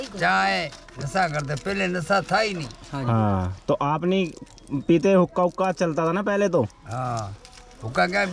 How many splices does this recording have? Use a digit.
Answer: 0